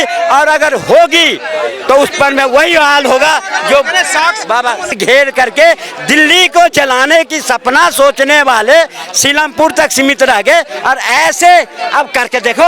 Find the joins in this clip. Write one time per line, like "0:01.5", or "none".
0:04.9